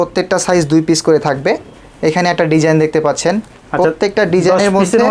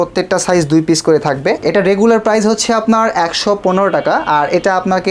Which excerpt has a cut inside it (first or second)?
second